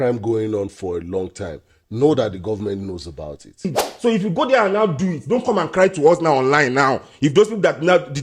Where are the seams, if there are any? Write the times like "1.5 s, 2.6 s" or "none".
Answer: 3.8 s